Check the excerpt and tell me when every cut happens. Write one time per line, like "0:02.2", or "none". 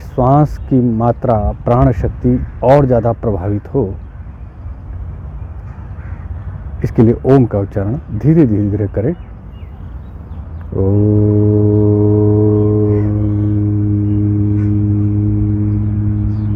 none